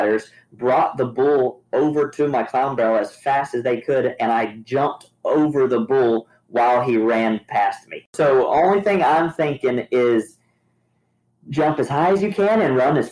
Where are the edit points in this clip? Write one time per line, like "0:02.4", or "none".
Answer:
0:08.1